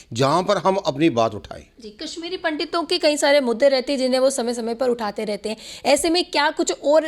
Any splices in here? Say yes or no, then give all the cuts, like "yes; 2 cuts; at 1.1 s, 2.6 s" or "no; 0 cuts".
no; 0 cuts